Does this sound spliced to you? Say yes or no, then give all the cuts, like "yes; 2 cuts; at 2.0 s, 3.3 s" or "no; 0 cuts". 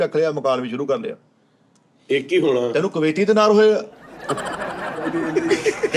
no; 0 cuts